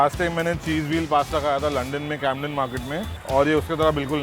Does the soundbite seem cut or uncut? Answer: cut